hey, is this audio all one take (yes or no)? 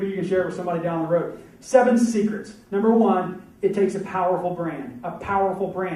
no